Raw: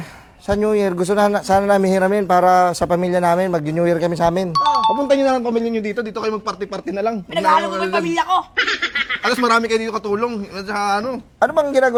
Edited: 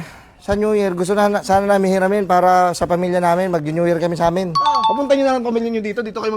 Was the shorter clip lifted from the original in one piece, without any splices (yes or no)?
yes